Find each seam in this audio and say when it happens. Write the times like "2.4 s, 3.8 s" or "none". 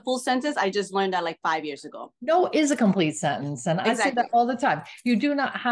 none